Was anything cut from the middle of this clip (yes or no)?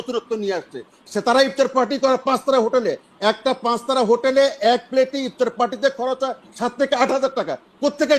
no